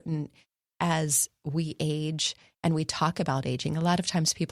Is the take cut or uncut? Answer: uncut